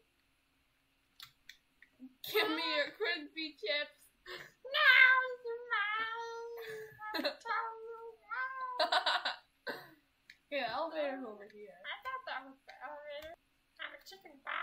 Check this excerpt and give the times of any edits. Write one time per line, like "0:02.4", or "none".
0:13.3